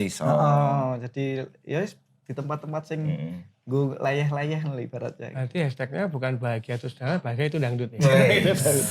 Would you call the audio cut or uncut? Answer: uncut